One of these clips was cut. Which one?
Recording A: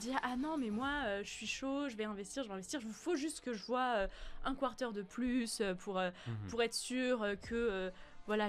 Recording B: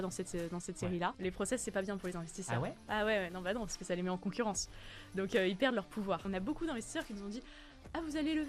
B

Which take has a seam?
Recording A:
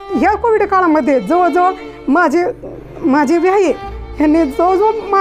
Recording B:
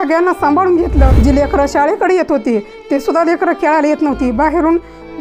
B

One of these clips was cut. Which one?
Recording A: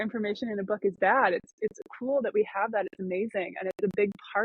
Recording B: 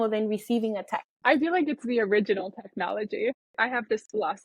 B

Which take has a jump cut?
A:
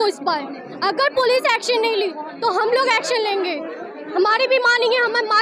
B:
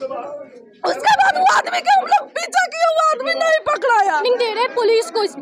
B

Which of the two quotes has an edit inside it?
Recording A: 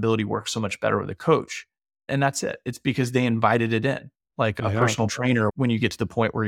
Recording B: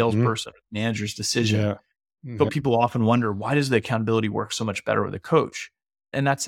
B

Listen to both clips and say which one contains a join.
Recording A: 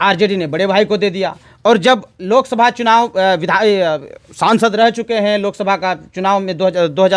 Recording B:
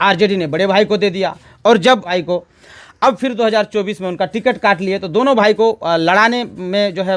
B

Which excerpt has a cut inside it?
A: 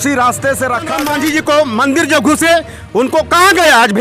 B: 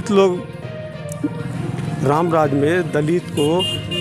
A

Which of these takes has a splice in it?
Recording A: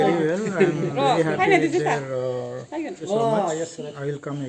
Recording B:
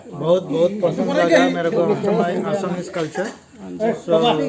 A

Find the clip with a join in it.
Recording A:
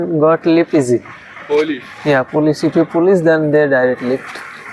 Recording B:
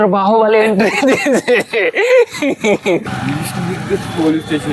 B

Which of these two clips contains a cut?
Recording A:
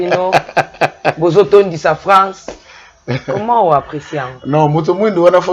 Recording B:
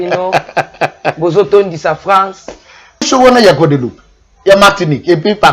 B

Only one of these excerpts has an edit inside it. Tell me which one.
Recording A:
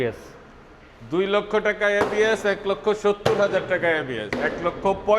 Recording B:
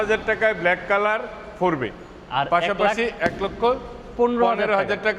A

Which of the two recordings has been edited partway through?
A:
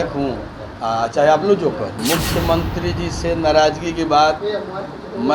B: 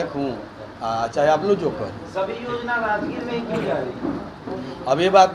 A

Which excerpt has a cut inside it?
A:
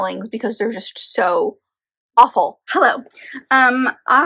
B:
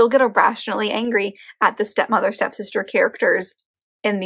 A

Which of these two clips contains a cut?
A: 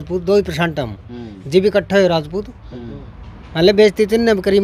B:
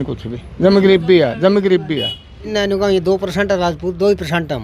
B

